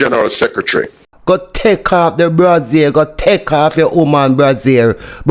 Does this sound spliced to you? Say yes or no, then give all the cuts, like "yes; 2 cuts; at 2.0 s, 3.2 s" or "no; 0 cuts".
yes; 1 cut; at 1.1 s